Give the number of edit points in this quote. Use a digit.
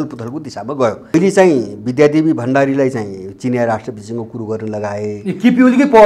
1